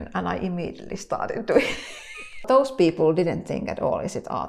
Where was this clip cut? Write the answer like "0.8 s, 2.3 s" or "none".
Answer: 2.4 s